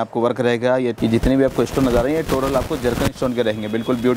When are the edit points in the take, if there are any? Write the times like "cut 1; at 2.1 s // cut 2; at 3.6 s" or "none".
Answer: cut 1; at 0.9 s